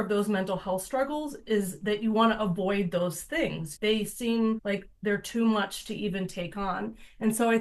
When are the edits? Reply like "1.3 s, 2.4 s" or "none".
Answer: 3.7 s, 4.6 s